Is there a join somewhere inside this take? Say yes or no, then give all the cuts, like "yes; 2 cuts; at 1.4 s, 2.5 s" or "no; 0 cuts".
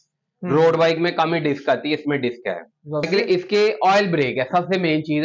yes; 1 cut; at 3.1 s